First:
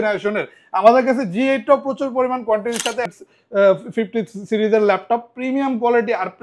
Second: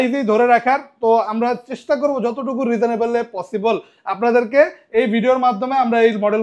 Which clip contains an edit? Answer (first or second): first